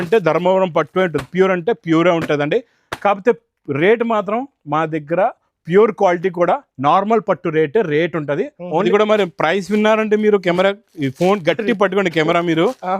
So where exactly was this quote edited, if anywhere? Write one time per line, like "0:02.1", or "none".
0:08.8